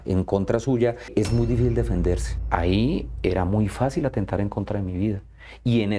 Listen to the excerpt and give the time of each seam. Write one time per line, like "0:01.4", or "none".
0:01.1
0:02.3